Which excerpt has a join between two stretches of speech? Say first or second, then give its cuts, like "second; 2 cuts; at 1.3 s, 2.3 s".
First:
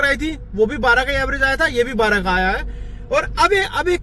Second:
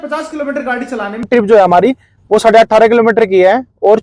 second; 1 cut; at 1.2 s